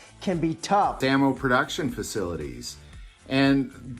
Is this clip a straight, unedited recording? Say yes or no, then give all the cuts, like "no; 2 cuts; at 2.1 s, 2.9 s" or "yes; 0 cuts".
no; 1 cut; at 1.0 s